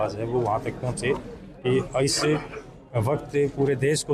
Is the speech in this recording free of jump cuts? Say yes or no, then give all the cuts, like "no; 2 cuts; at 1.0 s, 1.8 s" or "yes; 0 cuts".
yes; 0 cuts